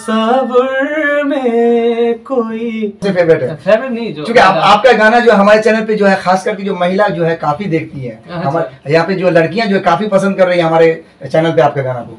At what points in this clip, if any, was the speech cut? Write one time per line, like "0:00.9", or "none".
0:03.0